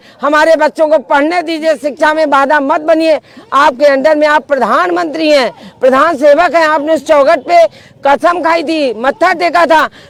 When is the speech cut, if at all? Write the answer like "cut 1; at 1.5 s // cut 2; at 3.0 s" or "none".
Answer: none